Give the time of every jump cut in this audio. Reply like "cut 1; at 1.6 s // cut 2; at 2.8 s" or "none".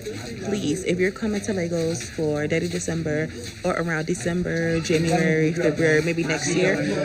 none